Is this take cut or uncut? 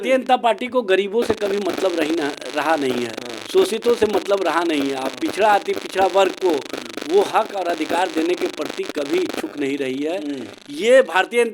uncut